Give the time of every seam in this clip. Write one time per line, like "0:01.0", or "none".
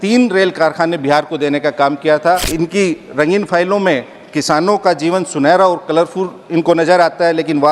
0:02.5